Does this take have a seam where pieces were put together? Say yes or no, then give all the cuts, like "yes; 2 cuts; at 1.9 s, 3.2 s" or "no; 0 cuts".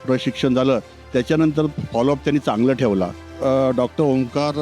yes; 1 cut; at 3.2 s